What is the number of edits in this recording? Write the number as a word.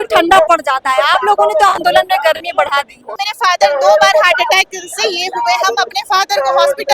one